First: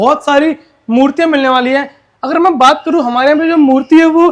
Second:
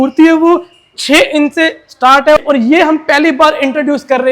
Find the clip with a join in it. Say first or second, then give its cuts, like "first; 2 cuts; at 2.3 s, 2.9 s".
second; 1 cut; at 2.4 s